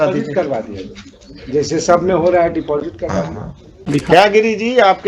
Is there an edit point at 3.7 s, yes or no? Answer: yes